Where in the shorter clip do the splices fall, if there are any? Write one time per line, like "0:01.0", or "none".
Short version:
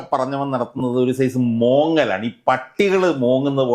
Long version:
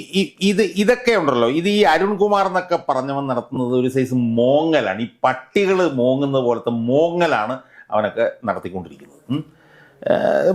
none

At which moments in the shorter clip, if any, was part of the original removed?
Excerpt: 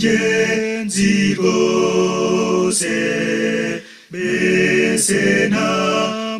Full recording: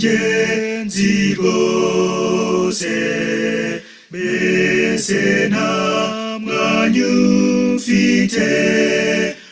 none

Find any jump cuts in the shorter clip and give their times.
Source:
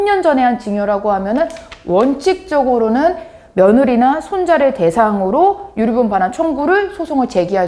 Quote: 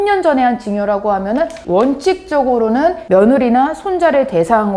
0:01.6
0:03.0

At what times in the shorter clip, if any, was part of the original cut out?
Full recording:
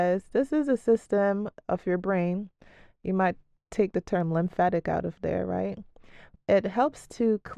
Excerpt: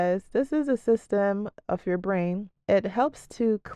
0:02.5

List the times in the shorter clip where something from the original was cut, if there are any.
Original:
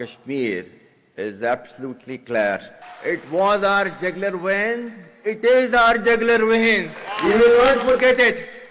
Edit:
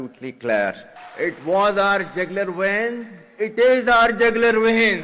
none

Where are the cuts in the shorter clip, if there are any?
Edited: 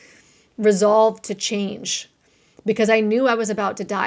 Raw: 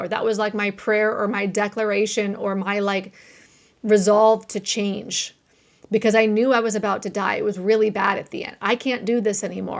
none

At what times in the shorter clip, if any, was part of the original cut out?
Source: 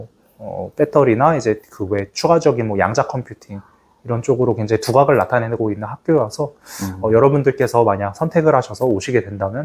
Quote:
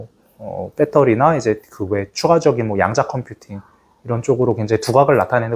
none

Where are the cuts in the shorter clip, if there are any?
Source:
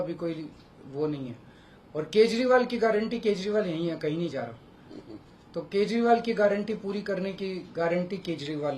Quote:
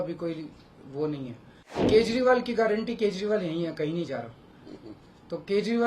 0:01.8

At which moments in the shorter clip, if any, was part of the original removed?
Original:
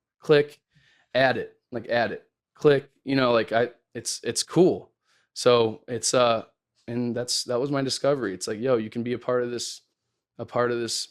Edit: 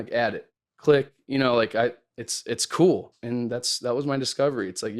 0:03.2

